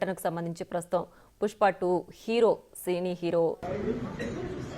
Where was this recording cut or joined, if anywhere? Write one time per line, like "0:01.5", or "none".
0:03.6